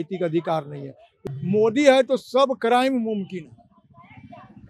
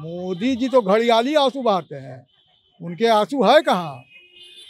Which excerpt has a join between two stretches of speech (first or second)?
first